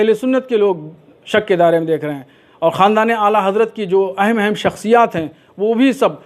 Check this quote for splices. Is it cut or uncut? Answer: uncut